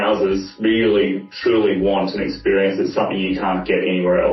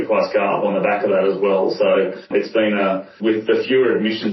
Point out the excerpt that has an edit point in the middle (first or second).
second